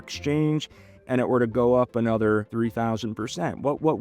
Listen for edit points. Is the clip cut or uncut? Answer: cut